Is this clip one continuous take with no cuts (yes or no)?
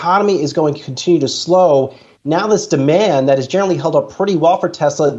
yes